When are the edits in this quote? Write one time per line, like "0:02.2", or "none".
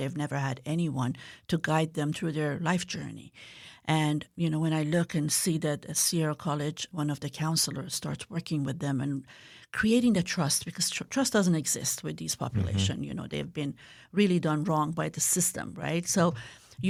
none

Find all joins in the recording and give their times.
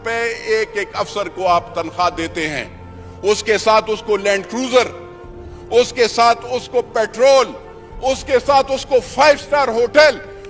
none

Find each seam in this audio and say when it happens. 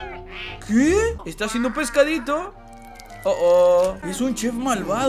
0:01.3
0:04.0

